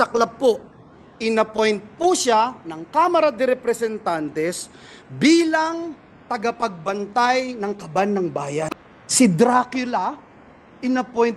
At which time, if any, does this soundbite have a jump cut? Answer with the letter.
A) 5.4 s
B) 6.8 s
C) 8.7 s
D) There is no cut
C